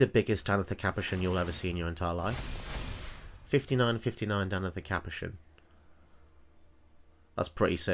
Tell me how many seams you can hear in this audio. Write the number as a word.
zero